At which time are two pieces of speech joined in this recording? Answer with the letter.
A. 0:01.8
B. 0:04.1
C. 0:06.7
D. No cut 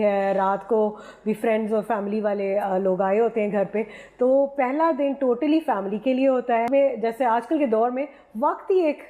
C